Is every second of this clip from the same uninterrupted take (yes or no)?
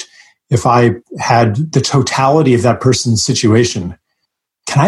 no